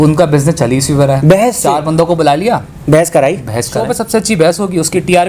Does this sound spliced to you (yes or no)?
yes